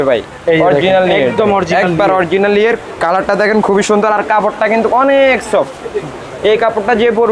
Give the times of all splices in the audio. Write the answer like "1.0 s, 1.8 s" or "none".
none

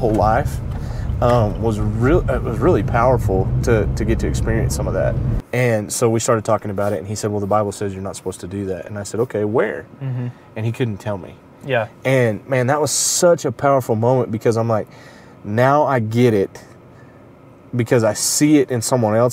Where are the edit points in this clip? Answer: 5.4 s

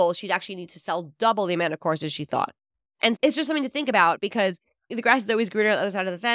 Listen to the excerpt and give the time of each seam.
4.9 s

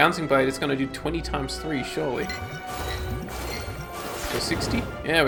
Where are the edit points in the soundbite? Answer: none

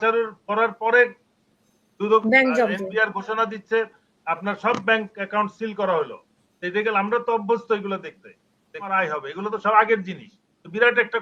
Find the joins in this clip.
8.9 s

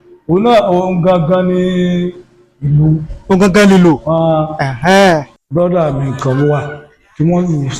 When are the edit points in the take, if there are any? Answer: 5.4 s

